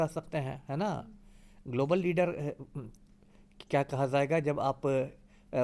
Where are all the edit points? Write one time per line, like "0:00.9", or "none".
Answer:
none